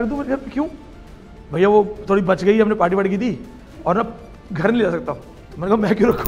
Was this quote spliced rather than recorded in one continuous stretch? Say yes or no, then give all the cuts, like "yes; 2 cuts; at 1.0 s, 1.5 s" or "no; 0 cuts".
no; 0 cuts